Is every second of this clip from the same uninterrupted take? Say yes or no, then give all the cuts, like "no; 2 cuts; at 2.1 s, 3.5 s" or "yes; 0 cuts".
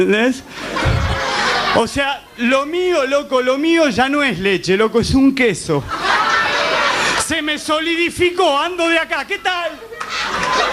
yes; 0 cuts